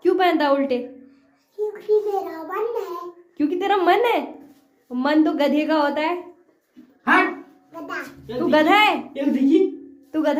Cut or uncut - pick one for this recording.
uncut